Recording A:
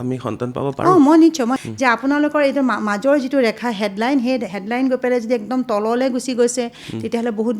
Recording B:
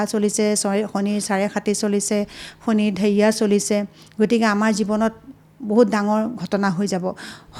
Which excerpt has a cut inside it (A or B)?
A